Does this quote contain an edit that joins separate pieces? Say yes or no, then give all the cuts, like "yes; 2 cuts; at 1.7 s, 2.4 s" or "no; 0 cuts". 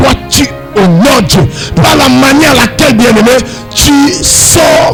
no; 0 cuts